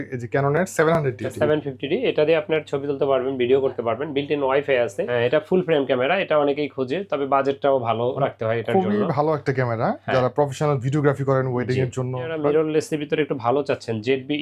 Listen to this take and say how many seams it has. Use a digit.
3